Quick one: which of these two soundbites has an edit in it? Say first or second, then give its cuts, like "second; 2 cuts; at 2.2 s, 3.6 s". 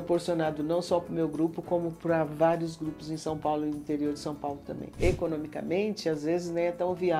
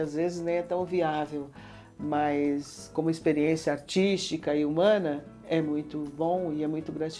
first; 1 cut; at 4.9 s